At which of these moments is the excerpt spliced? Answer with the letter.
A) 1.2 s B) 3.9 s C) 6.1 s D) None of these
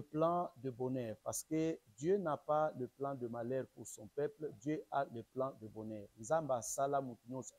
D